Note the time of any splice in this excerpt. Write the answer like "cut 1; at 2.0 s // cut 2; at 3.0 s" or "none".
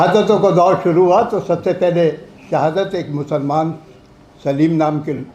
none